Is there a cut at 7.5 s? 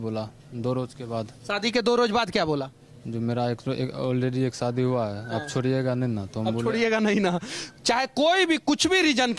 yes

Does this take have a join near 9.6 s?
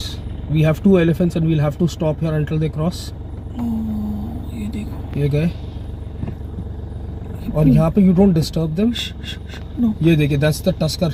no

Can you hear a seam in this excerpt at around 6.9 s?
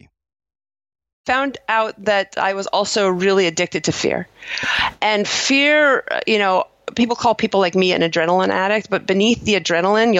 no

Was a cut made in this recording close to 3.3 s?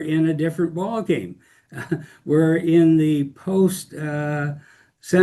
no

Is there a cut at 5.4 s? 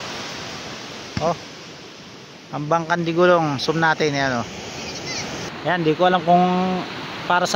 yes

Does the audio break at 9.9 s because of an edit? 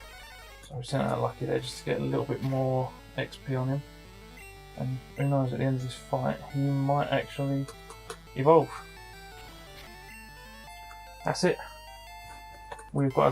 yes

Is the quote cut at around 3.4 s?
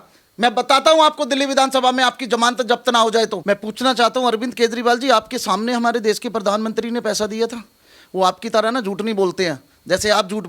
yes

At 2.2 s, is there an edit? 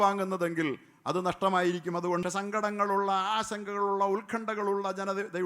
yes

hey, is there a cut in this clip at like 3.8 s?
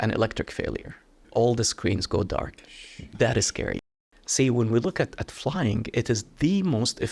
yes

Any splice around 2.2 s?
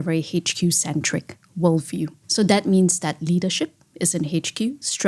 yes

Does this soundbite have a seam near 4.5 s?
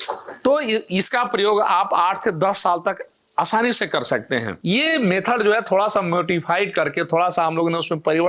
yes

